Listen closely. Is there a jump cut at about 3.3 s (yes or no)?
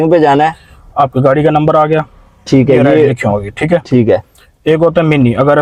no